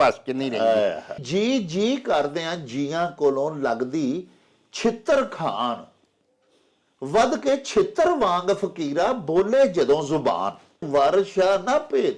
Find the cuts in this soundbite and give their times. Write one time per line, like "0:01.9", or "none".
0:01.2
0:10.9